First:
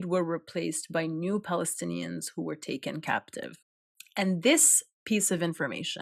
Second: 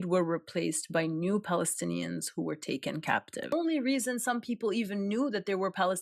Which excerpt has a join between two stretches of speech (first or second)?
second